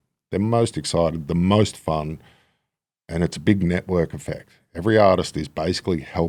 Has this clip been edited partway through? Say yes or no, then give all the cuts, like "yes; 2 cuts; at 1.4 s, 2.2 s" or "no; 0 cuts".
no; 0 cuts